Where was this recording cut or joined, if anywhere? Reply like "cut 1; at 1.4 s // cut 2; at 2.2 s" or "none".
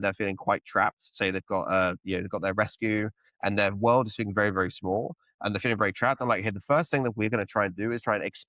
none